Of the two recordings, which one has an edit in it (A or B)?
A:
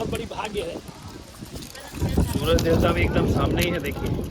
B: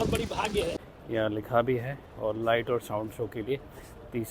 B